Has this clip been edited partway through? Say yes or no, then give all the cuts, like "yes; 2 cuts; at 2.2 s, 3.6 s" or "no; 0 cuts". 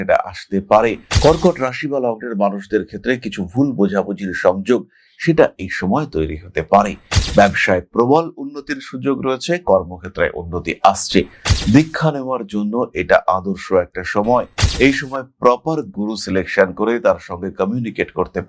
yes; 1 cut; at 1.1 s